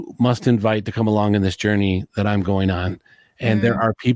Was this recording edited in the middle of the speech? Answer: no; 0 cuts

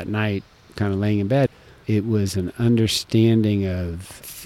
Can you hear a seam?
yes; 1 cut; at 1.5 s

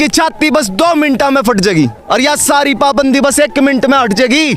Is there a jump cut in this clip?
no; 0 cuts

